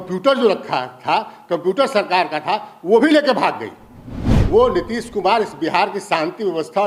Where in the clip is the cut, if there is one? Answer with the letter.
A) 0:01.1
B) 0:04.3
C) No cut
B